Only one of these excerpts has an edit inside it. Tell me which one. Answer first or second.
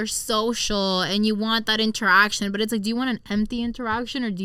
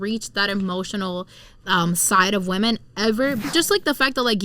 second